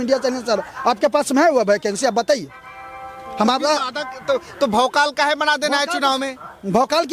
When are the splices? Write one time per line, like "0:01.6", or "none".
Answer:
none